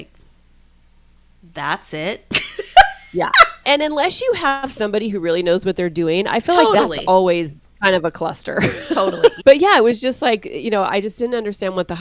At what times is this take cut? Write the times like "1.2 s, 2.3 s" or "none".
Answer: 3.6 s, 9.4 s